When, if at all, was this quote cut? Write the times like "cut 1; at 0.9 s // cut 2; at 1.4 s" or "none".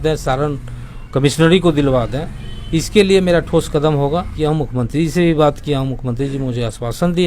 cut 1; at 4.3 s